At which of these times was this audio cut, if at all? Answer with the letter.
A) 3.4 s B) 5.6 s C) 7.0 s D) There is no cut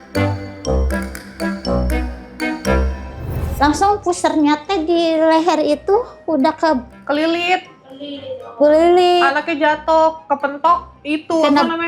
A